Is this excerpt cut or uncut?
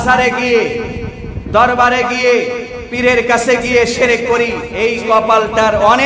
cut